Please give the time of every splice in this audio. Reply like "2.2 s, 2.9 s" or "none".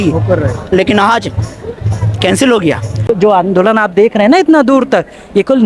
3.1 s

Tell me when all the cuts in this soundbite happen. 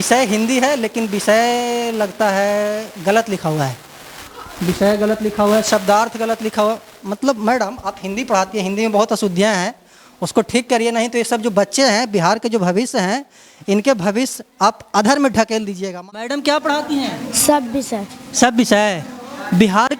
15.9 s

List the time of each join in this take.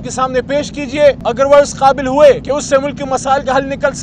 1.2 s, 2.4 s

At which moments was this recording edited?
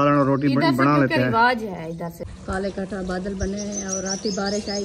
2.2 s

